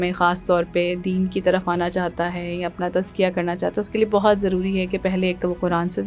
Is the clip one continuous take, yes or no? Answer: yes